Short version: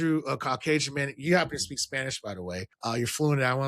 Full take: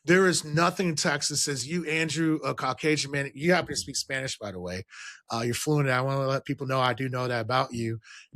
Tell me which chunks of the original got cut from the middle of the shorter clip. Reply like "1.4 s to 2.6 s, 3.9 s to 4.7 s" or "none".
4.9 s to 5.2 s